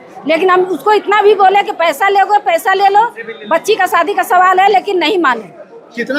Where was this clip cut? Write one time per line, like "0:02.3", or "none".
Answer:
none